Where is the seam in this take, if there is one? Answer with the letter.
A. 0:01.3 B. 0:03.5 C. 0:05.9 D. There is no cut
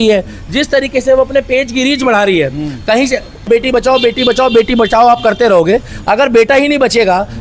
B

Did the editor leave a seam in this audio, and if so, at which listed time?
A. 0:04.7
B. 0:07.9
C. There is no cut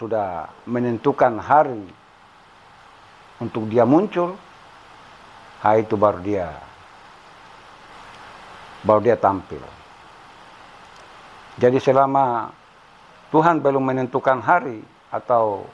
B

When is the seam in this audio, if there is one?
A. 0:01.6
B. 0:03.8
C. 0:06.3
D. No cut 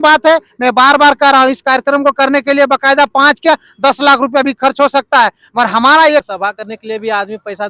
C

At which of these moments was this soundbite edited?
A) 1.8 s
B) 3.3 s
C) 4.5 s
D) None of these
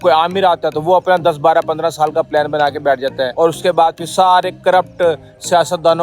B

